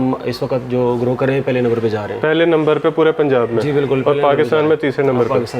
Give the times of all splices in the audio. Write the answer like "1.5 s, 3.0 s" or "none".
none